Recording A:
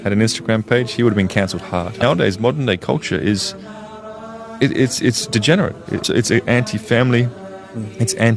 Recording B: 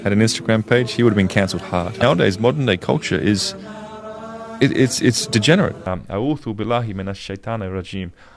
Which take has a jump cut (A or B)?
B